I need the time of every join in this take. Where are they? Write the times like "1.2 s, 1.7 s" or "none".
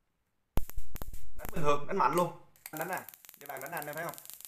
2.7 s